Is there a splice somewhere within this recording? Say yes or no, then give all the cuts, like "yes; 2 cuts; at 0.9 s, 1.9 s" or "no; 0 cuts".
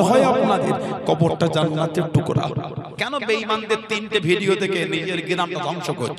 yes; 1 cut; at 2.9 s